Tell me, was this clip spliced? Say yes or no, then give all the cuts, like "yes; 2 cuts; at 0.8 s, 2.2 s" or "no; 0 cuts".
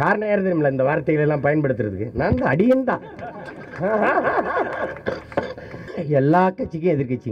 yes; 1 cut; at 5.8 s